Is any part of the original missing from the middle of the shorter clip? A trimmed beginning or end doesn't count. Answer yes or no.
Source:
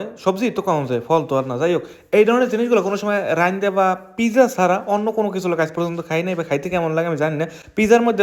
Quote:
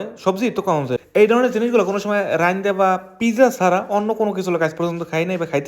yes